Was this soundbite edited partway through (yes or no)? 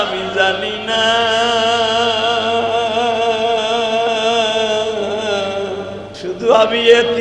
yes